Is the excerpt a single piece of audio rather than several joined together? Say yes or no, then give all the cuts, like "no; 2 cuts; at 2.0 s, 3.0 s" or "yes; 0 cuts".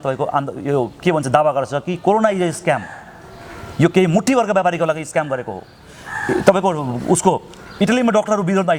yes; 0 cuts